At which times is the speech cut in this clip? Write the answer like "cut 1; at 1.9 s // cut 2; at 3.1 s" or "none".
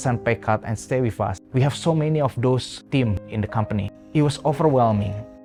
none

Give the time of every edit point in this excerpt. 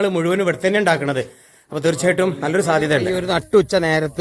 cut 1; at 3.1 s

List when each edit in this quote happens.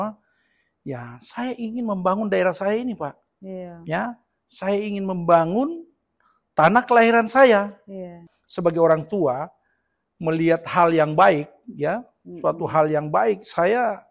cut 1; at 8.2 s

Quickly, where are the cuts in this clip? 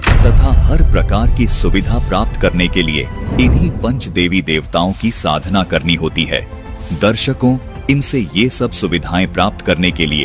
none

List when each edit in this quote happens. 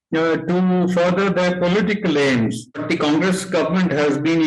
cut 1; at 2.8 s

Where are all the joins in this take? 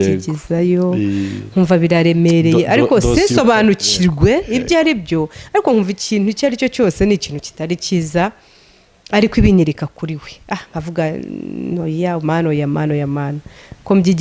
none

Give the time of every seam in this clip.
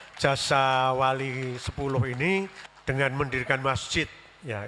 cut 1; at 2.7 s

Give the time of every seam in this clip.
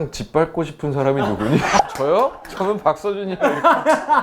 cut 1; at 1.8 s

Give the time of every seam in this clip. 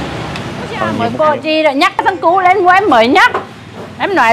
cut 1; at 1.0 s

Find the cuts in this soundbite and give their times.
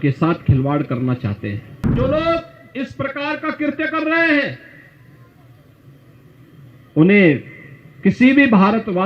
cut 1; at 1.9 s

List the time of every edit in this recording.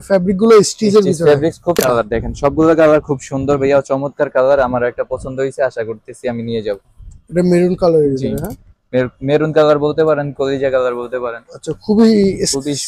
cut 1; at 1.8 s

